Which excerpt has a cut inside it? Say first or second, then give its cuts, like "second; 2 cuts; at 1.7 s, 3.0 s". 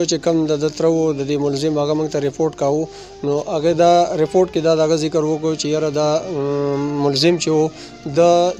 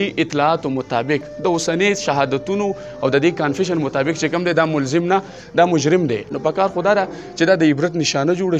second; 1 cut; at 6.3 s